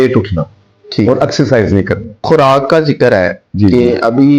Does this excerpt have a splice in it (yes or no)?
yes